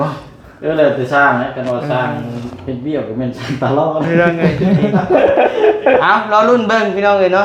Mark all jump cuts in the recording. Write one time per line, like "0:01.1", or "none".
0:06.0